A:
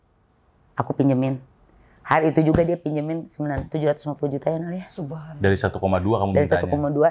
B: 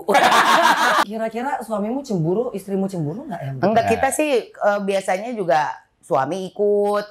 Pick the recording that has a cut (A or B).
B